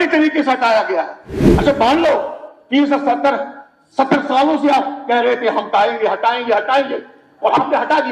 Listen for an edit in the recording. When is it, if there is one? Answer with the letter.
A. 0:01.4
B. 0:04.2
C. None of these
A